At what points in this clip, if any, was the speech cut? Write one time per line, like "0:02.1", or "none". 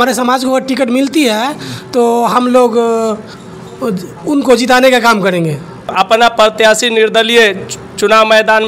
0:05.9

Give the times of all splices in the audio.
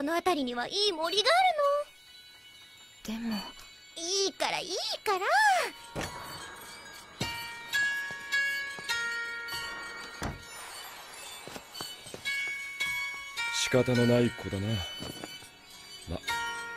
0:15.0

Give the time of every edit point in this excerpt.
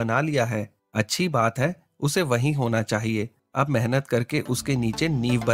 none

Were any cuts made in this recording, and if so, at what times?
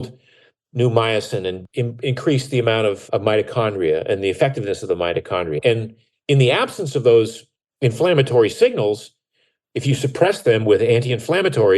0:01.6
0:03.0
0:05.6

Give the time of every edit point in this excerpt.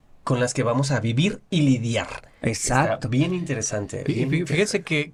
none

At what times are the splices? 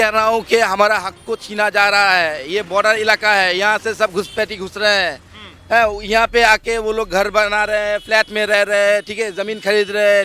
none

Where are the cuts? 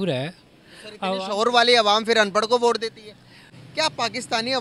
0:03.5

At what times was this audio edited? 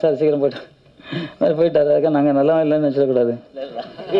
none

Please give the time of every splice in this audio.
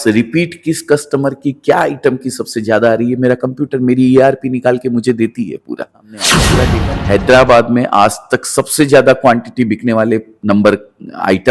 0:06.4

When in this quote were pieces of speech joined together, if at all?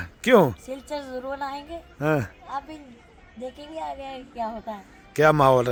none

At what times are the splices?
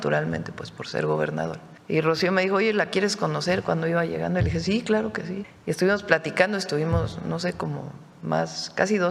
0:01.7
0:05.5

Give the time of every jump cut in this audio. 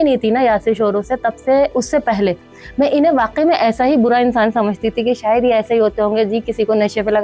none

